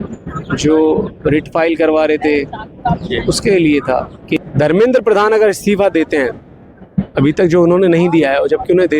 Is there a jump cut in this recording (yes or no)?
yes